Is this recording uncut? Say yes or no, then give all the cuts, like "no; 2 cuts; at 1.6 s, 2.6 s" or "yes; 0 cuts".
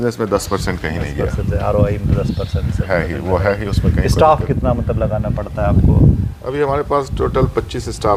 yes; 0 cuts